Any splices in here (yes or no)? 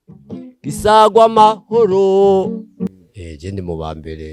yes